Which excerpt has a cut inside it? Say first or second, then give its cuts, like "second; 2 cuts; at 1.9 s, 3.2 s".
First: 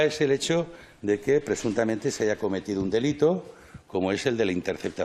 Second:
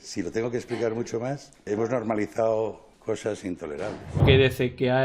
second; 3 cuts; at 1.7 s, 2.9 s, 4.2 s